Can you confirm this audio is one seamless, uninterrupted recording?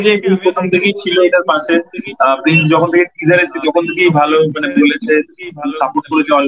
yes; 0 cuts

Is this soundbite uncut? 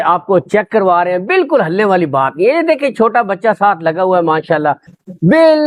yes; 0 cuts

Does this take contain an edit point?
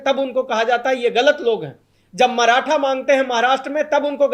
no; 0 cuts

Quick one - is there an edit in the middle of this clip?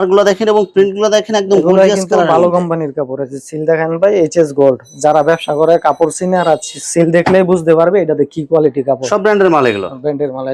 no; 0 cuts

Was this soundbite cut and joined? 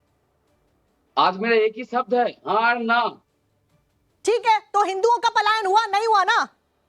no; 0 cuts

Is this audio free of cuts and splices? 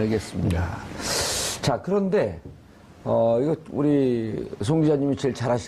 no; 1 cut; at 3.6 s

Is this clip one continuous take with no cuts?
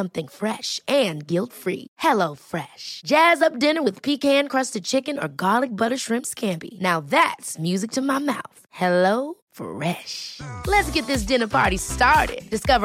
yes; 0 cuts

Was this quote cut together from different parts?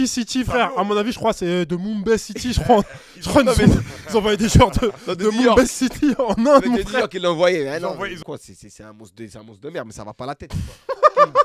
yes; 1 cut; at 8.2 s

